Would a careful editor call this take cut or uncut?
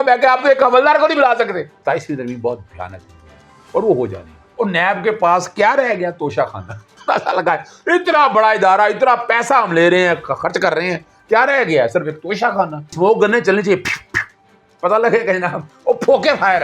cut